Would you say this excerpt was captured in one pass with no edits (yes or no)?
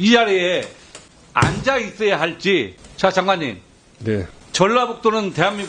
no